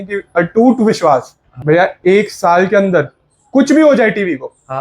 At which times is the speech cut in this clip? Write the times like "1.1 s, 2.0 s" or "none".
1.4 s